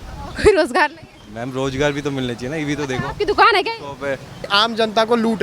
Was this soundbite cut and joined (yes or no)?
yes